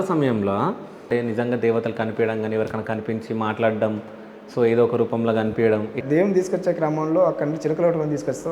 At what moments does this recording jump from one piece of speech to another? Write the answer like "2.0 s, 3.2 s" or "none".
1.0 s, 6.0 s

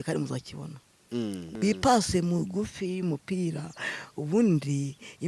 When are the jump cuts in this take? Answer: 1.4 s

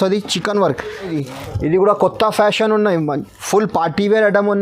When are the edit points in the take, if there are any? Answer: 1.1 s

